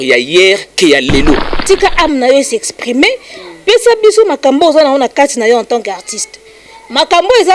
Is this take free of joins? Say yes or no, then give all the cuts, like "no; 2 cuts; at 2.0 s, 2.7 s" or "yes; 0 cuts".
no; 1 cut; at 1.5 s